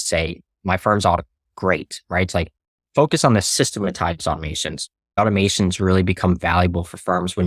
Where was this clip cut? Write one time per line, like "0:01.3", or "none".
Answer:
0:03.5
0:05.2

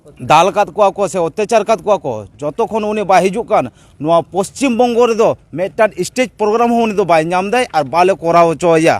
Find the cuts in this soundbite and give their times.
none

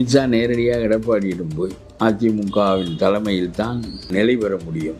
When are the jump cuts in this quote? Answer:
0:04.1

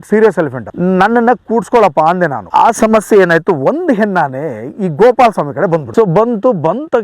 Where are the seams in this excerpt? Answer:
0:02.4
0:05.9

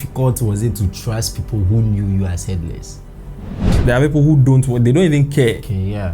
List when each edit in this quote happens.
0:03.7

